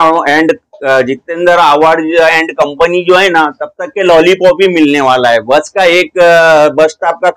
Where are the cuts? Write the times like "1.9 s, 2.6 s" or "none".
none